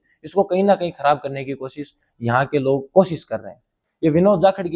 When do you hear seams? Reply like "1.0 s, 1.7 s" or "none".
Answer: 3.8 s